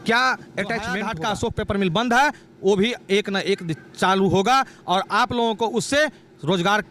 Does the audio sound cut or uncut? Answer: cut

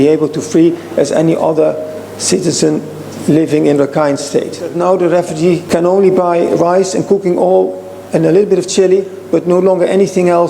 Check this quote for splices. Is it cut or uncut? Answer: cut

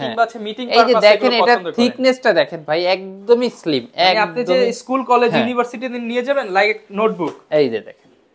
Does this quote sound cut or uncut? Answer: uncut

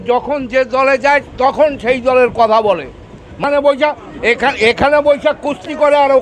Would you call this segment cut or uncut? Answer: cut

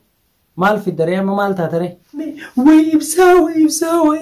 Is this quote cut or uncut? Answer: cut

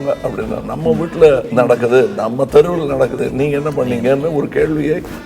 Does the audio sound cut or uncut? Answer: cut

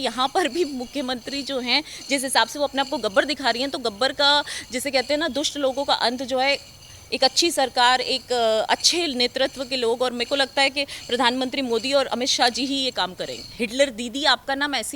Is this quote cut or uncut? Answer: cut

